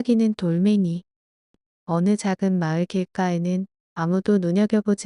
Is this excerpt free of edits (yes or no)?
no